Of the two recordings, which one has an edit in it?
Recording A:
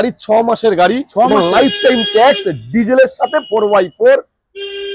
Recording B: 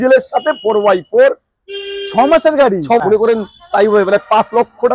B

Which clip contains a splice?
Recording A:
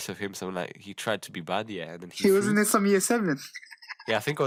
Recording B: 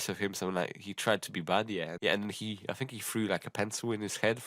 B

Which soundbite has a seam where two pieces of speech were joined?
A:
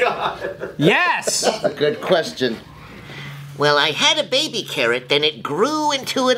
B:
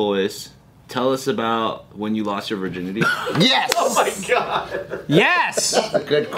A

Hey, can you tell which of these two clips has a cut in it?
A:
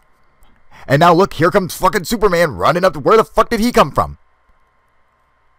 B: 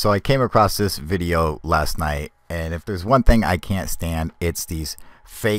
A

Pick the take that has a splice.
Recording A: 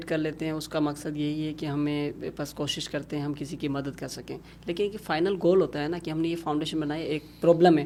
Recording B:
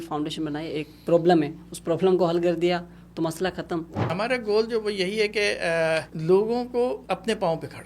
B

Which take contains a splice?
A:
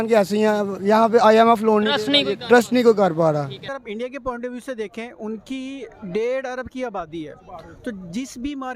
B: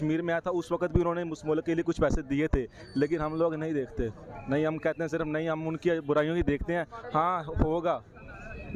A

